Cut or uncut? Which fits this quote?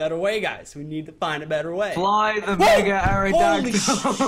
uncut